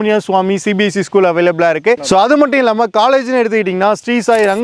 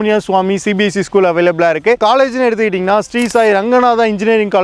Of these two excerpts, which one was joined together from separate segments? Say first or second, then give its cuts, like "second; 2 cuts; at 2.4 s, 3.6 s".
second; 1 cut; at 2.0 s